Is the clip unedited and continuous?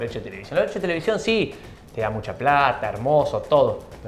yes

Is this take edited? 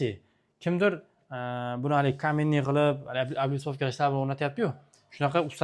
no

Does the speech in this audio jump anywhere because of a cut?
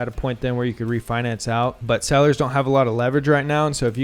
yes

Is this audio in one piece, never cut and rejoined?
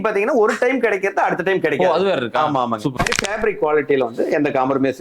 no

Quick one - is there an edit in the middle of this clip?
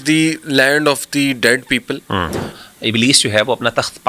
yes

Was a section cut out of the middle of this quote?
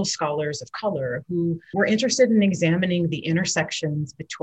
yes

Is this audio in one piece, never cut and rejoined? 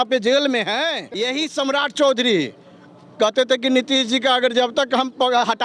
no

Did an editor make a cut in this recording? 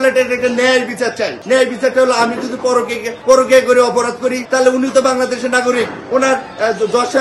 no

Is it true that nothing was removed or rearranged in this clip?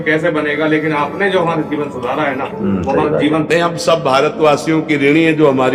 yes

